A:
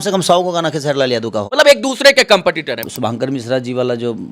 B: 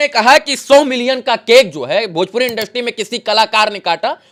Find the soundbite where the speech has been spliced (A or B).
A